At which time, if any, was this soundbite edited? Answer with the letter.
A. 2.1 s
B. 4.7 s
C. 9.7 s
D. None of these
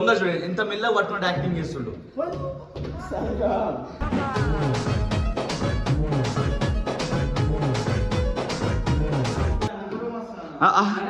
C